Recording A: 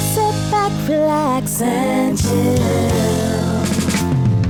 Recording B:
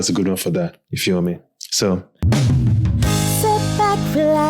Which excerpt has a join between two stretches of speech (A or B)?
B